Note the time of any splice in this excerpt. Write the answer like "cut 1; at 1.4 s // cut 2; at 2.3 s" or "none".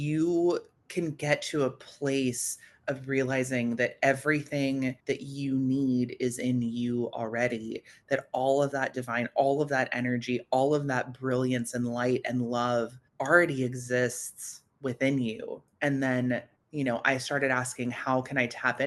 none